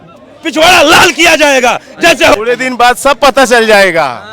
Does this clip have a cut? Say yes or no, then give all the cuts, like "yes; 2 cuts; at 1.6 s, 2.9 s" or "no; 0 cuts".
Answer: yes; 1 cut; at 2.3 s